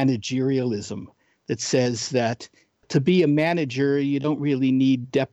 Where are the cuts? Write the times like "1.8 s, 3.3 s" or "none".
2.8 s